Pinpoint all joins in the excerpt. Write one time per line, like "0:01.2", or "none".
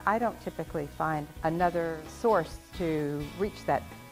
0:01.3
0:02.1
0:02.6